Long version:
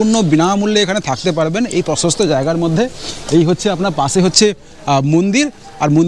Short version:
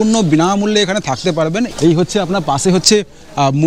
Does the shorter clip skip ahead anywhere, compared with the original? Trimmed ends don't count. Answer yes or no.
yes